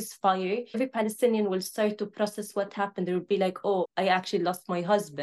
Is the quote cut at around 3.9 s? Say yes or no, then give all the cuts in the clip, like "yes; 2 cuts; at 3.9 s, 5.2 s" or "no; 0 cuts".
yes; 2 cuts; at 0.8 s, 3.9 s